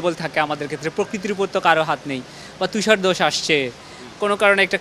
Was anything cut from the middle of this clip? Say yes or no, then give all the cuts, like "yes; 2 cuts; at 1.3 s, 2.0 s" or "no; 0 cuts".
no; 0 cuts